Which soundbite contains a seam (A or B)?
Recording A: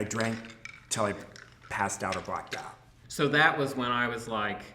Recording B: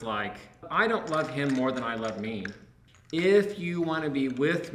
A